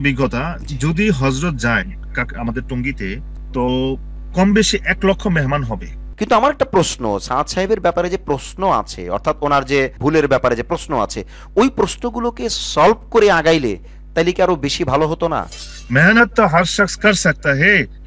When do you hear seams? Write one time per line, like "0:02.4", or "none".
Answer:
0:06.1
0:10.0
0:15.7